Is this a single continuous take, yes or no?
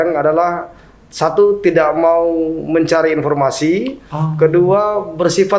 yes